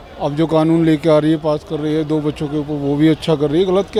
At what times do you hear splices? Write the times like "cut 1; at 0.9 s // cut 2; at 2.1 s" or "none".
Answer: none

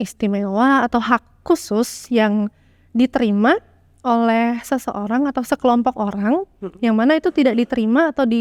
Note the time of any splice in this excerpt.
none

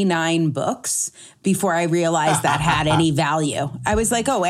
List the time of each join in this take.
none

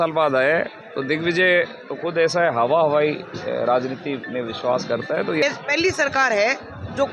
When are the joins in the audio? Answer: cut 1; at 5.4 s

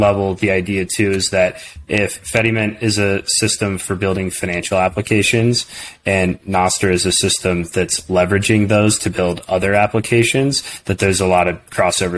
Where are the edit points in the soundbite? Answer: none

